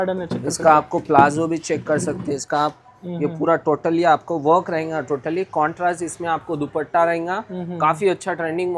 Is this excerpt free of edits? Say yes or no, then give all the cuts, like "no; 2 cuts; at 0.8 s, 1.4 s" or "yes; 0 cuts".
yes; 0 cuts